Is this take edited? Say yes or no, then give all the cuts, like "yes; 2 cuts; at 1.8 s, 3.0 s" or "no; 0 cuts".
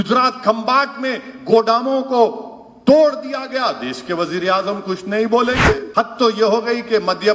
yes; 1 cut; at 5.9 s